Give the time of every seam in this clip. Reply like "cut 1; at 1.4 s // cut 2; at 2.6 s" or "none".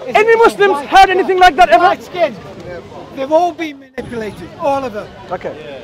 none